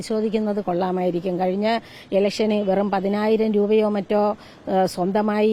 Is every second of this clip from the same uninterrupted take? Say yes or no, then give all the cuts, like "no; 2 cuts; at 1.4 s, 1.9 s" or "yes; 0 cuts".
yes; 0 cuts